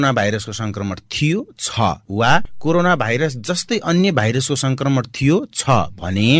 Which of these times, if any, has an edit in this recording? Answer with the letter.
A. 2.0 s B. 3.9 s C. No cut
A